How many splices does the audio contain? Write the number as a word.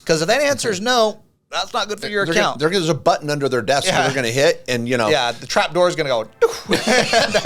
zero